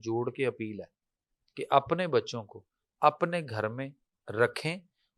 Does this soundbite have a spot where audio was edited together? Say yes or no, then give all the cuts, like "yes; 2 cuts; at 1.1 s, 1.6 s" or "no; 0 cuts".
no; 0 cuts